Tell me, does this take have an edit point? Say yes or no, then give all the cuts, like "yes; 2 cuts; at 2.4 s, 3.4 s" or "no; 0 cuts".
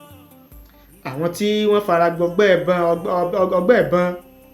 no; 0 cuts